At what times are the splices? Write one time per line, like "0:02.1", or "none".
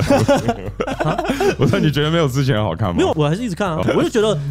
none